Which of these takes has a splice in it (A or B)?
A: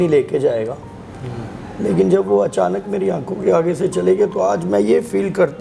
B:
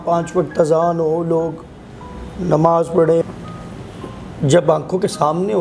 B